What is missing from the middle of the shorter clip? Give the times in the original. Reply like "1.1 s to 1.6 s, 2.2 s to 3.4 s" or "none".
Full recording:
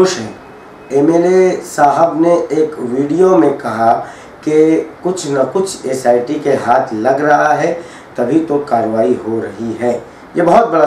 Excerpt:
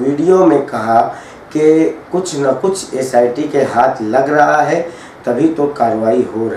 none